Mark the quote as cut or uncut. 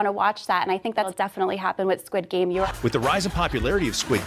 cut